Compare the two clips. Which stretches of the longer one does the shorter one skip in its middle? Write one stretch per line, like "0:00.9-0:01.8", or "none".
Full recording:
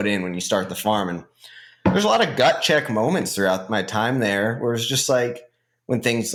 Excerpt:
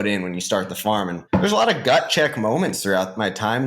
0:01.2-0:01.7